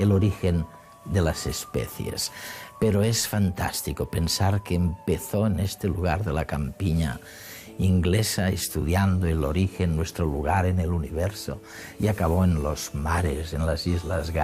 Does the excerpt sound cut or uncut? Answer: cut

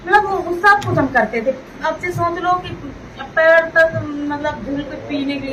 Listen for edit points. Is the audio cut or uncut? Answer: uncut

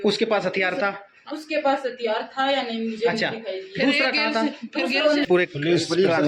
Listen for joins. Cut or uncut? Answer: cut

